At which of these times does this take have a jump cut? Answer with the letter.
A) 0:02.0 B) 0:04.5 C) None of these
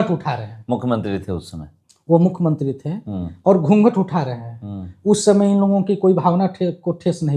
C